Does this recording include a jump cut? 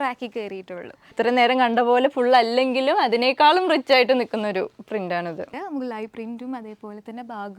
yes; 2 cuts; at 1.1 s, 5.5 s

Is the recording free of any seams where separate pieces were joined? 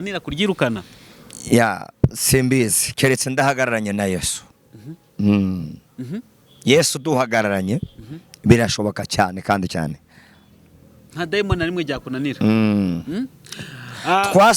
yes; 0 cuts

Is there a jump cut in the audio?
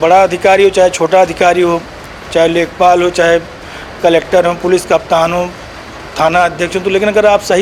no; 0 cuts

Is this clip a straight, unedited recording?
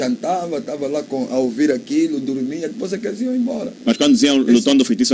yes; 0 cuts

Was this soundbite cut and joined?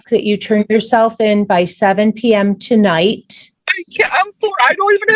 no; 0 cuts

